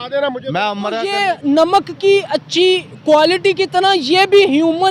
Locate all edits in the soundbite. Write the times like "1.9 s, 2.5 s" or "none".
1.1 s